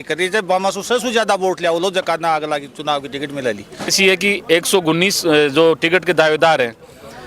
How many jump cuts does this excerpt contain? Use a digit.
1